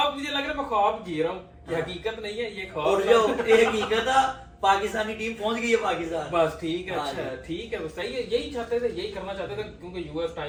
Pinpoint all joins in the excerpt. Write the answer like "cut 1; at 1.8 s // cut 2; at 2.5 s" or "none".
none